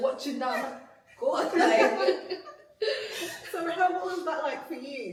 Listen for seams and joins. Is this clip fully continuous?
yes; 0 cuts

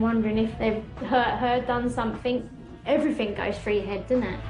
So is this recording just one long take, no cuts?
no; 2 cuts; at 0.8 s, 2.4 s

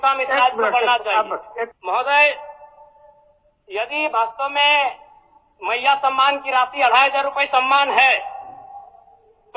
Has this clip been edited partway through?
yes; 1 cut; at 1.8 s

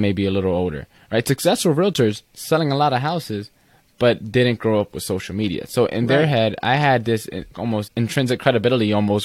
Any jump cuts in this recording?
yes; 1 cut; at 7.8 s

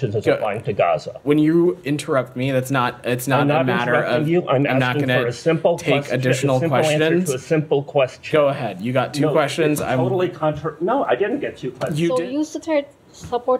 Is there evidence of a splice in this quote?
yes; 1 cut; at 12.1 s

